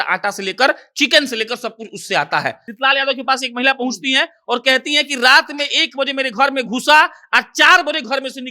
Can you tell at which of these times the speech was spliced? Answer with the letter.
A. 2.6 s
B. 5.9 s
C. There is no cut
A